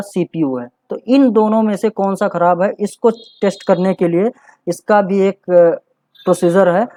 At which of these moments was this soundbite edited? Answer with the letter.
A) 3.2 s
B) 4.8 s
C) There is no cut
C